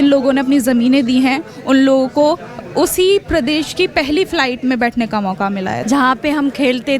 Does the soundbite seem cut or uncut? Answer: cut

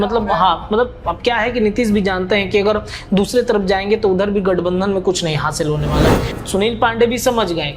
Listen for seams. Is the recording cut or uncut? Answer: cut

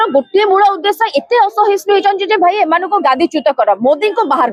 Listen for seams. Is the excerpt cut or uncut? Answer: uncut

